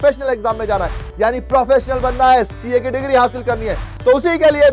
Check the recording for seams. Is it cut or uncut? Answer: uncut